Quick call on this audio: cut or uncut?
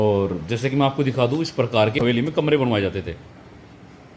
cut